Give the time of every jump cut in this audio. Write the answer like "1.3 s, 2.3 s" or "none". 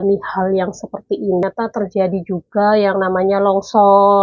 1.4 s